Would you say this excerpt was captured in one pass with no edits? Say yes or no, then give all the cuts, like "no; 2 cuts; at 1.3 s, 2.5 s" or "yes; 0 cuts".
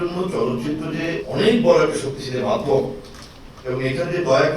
no; 1 cut; at 1.2 s